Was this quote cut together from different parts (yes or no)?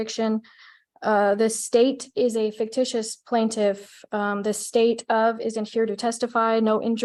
no